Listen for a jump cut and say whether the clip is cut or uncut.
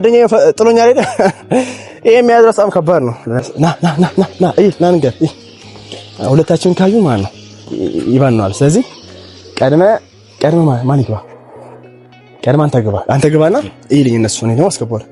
cut